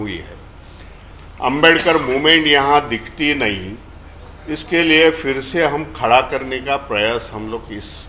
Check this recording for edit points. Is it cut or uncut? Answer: uncut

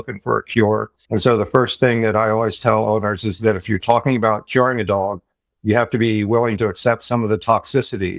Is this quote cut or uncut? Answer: cut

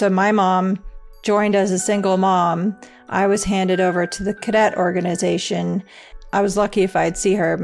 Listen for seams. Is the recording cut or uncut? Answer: cut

